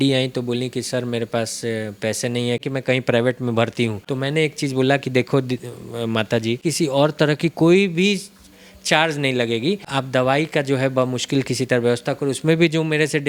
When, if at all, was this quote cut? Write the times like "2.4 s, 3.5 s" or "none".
2.6 s, 4.0 s, 6.6 s, 9.9 s